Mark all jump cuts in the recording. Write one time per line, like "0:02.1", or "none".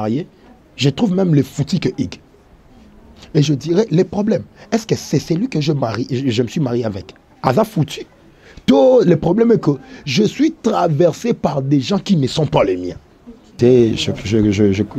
0:13.6